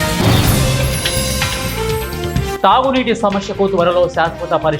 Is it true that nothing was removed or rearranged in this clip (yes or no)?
yes